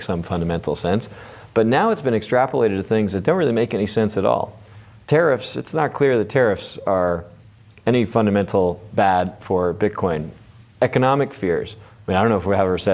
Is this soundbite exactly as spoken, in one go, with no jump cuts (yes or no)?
yes